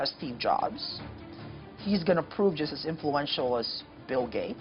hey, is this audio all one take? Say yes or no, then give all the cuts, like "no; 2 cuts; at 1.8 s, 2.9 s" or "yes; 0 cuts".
yes; 0 cuts